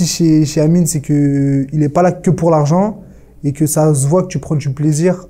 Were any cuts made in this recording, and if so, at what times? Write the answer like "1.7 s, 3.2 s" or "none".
none